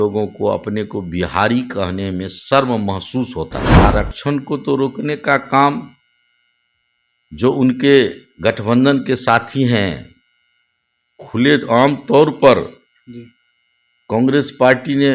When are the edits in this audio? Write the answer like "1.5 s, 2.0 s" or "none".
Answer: 3.7 s